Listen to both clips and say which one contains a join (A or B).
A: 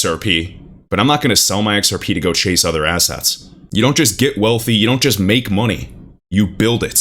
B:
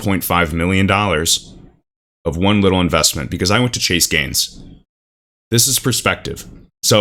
A